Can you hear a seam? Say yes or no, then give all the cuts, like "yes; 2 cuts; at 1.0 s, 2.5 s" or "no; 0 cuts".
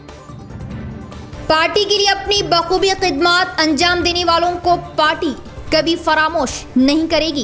no; 0 cuts